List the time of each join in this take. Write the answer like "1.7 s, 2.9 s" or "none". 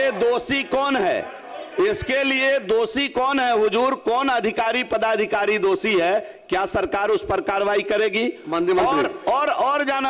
none